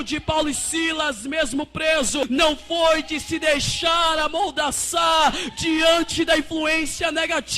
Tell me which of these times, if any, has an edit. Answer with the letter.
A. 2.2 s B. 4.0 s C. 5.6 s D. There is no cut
A